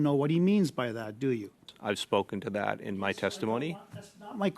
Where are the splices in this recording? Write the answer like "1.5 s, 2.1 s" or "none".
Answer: 1.7 s